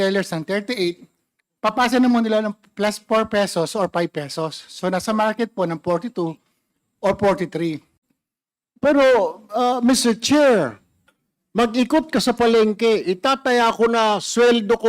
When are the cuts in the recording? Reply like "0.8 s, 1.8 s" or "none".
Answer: 7.9 s